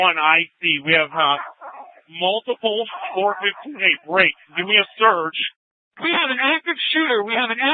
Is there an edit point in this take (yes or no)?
yes